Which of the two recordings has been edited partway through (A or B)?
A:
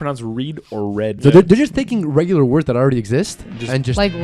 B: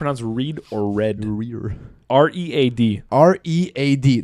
A